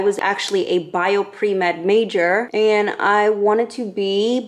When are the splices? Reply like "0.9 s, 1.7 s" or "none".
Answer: 2.5 s